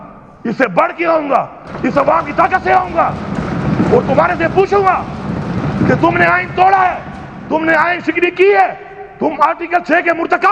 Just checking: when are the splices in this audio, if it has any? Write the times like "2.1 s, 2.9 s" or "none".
none